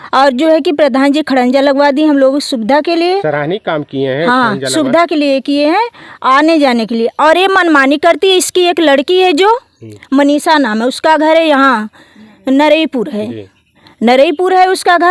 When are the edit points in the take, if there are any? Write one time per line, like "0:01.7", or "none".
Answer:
none